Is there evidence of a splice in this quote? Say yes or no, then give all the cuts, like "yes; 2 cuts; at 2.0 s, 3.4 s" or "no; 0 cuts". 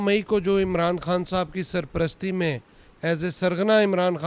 no; 0 cuts